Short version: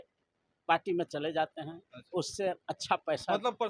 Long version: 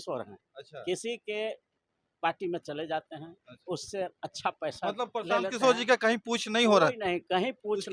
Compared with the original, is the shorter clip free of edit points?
yes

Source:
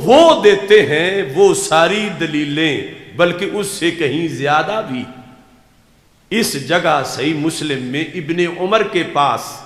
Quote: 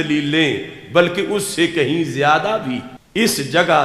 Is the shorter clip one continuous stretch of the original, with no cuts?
no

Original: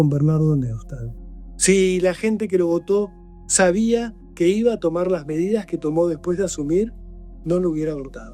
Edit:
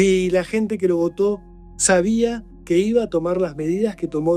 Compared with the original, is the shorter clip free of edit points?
yes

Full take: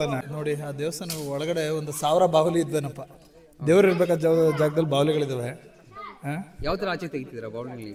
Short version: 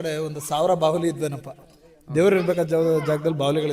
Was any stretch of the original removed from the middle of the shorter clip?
no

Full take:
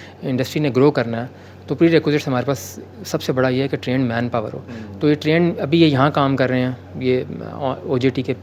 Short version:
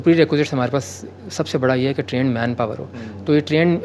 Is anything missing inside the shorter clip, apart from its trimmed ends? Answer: no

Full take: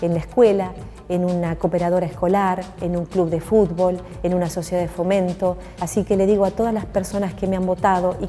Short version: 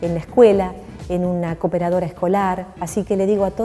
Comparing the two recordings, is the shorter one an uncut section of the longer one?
no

